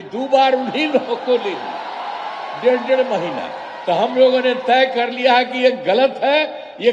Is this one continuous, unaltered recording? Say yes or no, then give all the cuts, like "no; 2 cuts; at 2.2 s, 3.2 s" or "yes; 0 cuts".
yes; 0 cuts